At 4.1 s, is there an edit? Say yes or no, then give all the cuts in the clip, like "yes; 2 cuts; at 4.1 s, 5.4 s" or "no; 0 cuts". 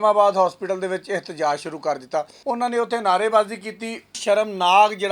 yes; 2 cuts; at 2.3 s, 4.1 s